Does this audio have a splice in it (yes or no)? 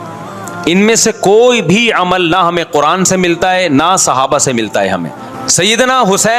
yes